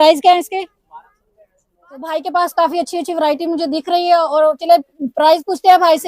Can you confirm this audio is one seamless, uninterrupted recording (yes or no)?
no